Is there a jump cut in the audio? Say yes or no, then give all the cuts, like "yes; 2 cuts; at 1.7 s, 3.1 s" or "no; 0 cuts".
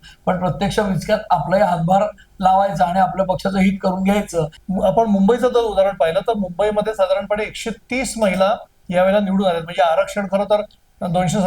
yes; 1 cut; at 4.6 s